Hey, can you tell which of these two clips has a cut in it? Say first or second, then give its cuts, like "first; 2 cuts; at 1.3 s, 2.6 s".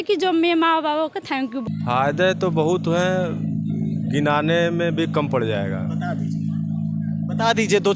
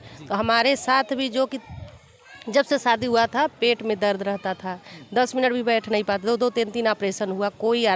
first; 1 cut; at 1.6 s